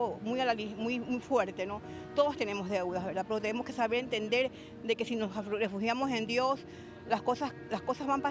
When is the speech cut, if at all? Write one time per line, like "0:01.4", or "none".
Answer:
none